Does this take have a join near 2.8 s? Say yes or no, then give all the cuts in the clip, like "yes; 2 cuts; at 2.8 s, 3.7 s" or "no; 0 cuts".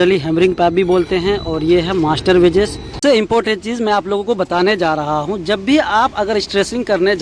yes; 1 cut; at 2.8 s